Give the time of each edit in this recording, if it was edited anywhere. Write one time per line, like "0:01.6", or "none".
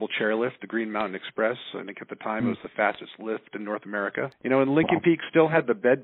0:04.4